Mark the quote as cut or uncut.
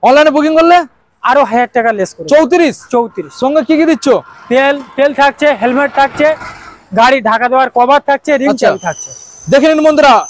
uncut